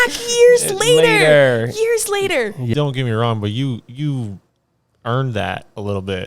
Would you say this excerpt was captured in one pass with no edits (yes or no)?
no